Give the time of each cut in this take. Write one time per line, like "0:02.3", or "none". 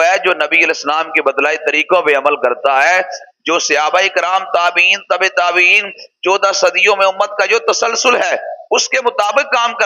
none